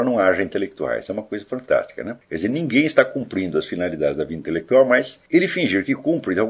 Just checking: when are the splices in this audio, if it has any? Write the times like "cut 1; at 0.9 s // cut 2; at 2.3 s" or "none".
cut 1; at 2.2 s // cut 2; at 5.2 s